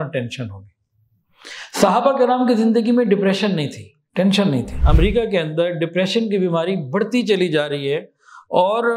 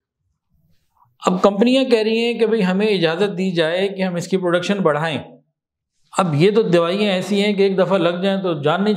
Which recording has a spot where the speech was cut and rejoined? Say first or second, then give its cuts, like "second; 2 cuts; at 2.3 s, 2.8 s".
first; 1 cut; at 4.8 s